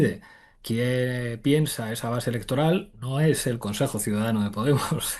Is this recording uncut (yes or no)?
yes